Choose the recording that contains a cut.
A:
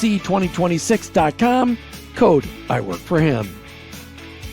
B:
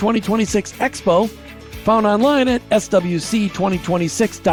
A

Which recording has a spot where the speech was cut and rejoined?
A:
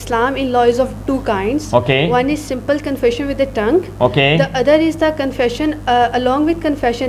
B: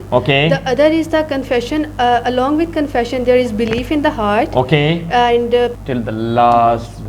B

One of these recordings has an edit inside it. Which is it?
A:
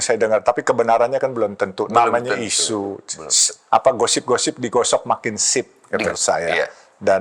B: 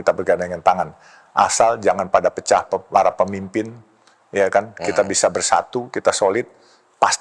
A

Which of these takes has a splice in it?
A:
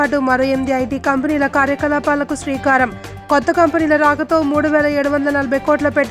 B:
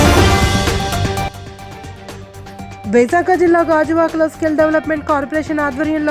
B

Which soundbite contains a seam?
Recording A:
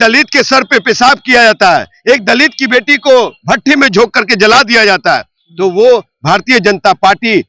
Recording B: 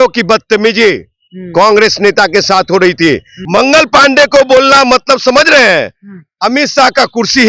B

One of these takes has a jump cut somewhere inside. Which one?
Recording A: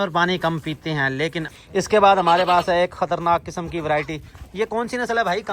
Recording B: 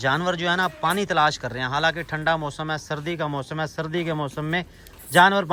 A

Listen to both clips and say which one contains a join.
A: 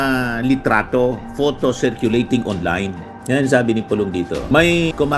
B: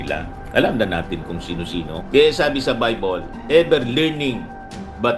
B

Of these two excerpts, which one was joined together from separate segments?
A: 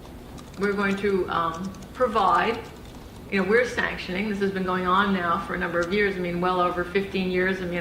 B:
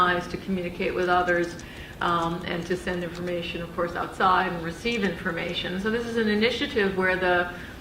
B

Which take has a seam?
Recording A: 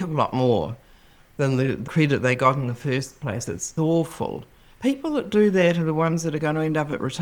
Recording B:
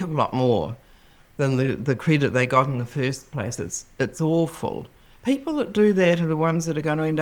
A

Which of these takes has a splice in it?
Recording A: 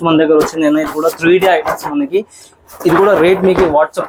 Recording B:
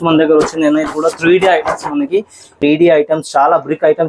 B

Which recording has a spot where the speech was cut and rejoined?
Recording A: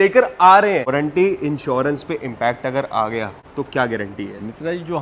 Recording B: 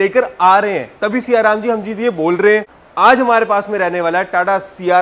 A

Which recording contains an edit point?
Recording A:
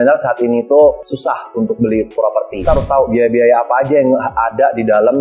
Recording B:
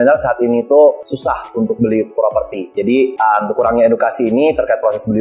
A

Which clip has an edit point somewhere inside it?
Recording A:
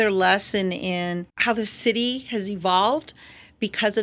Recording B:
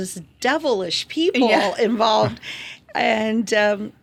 A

